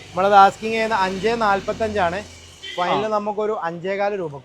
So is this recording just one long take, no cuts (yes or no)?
yes